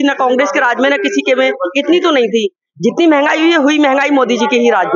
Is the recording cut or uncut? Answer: uncut